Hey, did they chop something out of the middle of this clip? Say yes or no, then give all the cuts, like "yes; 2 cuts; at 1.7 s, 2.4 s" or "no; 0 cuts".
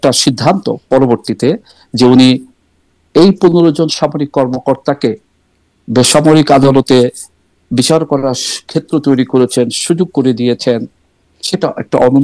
no; 0 cuts